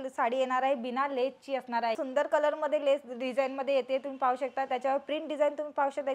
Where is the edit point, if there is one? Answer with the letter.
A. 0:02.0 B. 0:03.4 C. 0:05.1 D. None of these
A